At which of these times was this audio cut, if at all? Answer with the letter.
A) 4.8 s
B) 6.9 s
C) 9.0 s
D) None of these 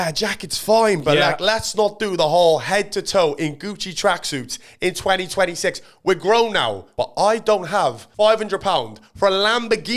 B